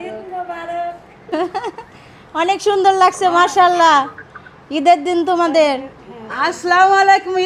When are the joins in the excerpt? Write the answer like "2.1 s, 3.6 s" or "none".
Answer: 1.1 s